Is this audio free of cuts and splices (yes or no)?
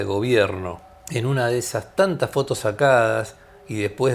no